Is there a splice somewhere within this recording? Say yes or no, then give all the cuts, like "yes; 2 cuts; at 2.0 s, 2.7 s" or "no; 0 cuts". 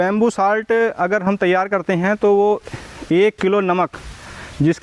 no; 0 cuts